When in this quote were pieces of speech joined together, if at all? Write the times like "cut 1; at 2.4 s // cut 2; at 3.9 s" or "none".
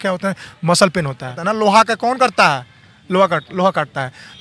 cut 1; at 1.4 s